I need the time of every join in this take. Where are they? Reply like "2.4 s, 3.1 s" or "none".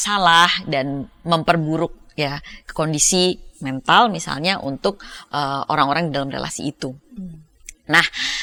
none